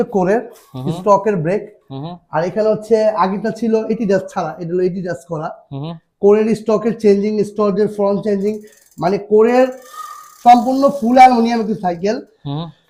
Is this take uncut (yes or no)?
yes